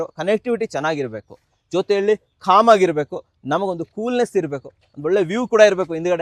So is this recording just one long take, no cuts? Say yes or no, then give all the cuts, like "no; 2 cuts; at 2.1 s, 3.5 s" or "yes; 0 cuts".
yes; 0 cuts